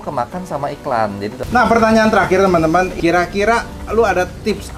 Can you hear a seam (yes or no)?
yes